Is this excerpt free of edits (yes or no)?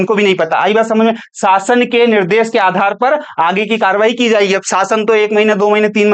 yes